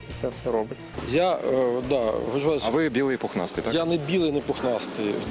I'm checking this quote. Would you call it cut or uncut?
cut